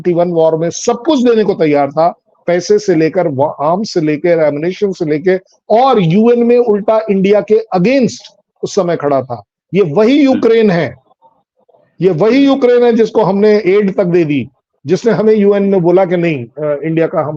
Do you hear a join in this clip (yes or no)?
no